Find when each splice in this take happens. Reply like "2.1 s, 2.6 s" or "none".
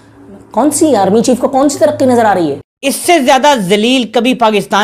2.7 s